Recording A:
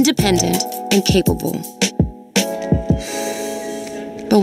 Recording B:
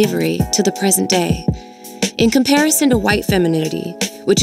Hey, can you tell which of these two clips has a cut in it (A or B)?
B